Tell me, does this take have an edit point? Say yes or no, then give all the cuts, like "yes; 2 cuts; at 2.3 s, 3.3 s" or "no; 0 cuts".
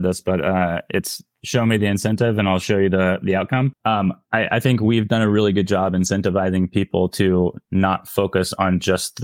yes; 1 cut; at 3.7 s